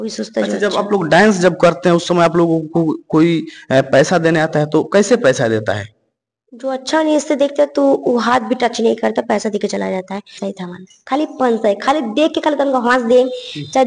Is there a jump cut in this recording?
yes; 1 cut; at 10.4 s

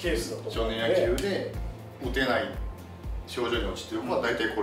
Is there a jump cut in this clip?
no; 0 cuts

